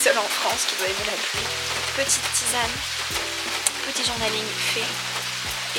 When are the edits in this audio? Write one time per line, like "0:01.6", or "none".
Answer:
none